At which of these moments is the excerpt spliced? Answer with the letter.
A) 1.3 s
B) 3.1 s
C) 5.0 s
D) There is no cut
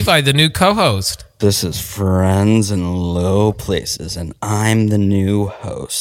A